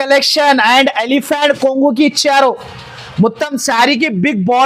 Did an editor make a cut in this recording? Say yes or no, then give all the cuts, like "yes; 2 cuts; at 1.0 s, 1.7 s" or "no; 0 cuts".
no; 0 cuts